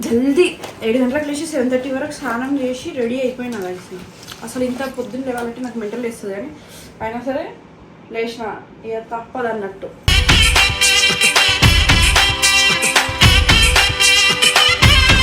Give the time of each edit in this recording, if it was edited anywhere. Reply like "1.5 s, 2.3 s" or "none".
none